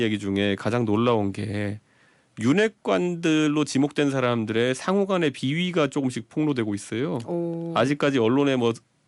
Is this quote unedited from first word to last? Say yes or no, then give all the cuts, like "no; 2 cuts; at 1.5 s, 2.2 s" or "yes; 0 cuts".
yes; 0 cuts